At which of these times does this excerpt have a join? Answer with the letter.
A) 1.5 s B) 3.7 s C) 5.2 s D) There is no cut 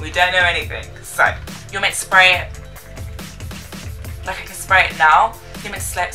A